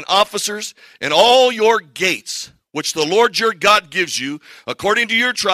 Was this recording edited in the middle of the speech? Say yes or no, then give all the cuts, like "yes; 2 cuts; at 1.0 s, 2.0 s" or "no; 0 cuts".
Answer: no; 0 cuts